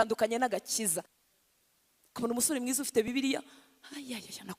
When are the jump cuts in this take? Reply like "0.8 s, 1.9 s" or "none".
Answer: 1.1 s